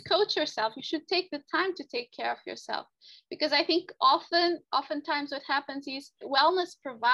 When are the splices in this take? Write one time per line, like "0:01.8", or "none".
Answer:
0:04.6
0:06.2